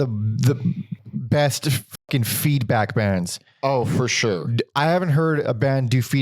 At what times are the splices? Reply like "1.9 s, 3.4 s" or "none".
0.9 s